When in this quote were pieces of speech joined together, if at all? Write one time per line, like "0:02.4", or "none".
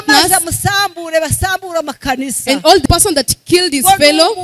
0:02.9